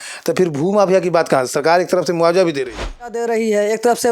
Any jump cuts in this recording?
yes; 1 cut; at 3.2 s

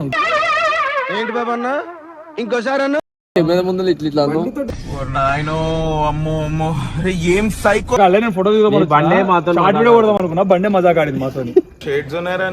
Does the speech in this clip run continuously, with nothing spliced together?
no; 2 cuts; at 3.3 s, 8.0 s

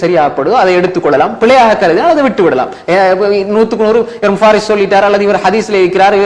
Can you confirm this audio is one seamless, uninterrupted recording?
yes; 0 cuts

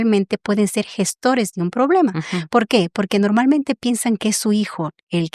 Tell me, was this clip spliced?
no; 0 cuts

